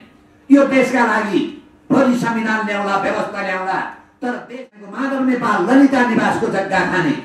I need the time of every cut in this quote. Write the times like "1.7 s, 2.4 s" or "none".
5.0 s